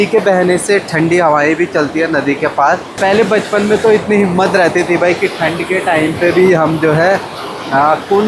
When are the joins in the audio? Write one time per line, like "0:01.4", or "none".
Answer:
0:02.9